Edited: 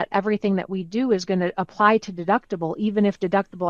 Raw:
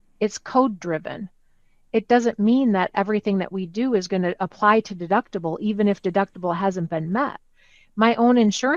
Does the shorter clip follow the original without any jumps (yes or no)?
yes